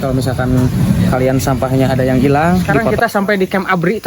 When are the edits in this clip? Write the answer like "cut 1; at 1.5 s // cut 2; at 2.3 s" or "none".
cut 1; at 2.8 s